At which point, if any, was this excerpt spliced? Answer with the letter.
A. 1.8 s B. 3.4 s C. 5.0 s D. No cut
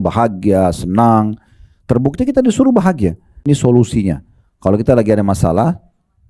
B